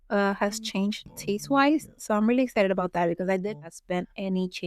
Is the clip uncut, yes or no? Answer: no